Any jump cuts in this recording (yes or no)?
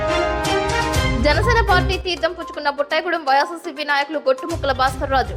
yes